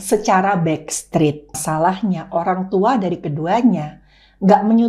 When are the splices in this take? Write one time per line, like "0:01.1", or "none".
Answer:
0:01.6